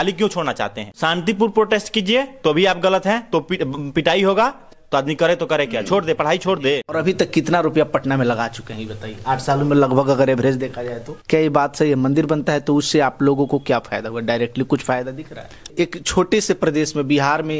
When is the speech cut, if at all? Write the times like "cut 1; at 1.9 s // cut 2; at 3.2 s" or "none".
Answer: cut 1; at 0.9 s // cut 2; at 4.7 s // cut 3; at 7.0 s // cut 4; at 11.1 s // cut 5; at 15.7 s